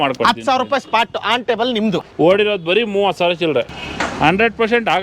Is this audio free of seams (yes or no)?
no